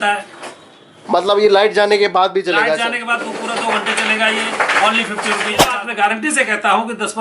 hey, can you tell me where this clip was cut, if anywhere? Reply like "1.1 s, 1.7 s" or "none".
5.7 s